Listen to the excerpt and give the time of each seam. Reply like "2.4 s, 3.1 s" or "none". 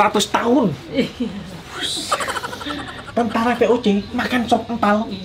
3.1 s

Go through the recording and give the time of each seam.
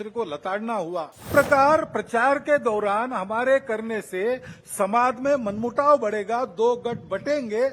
1.3 s

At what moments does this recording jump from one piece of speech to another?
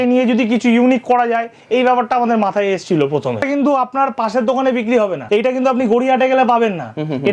3.4 s, 5.2 s

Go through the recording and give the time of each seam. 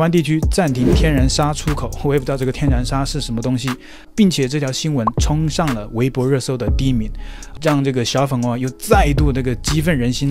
none

